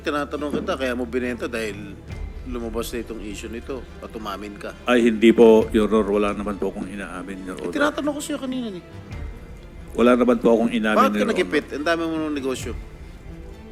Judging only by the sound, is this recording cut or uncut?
uncut